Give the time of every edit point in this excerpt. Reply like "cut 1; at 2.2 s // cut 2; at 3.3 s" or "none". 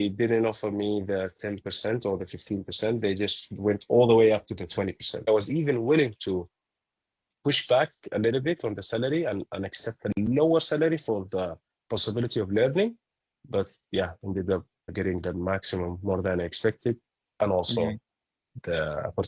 cut 1; at 5.3 s // cut 2; at 14.9 s